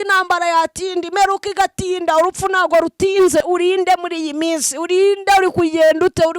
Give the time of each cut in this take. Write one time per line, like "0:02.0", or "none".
0:03.4